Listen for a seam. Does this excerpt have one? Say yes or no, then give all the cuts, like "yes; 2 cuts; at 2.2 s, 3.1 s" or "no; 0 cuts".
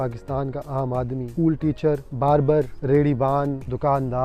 no; 0 cuts